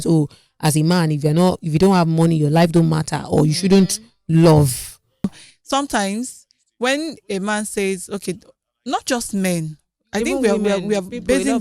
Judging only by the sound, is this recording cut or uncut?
cut